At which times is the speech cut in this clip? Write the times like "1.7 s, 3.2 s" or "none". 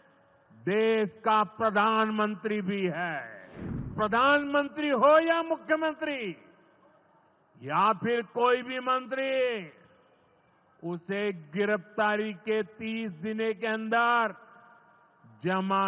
3.9 s